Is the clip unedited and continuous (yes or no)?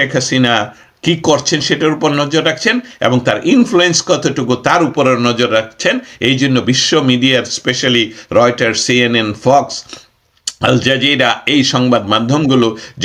yes